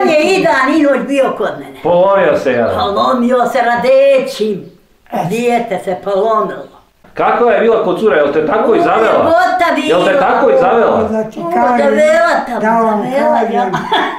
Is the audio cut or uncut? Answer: cut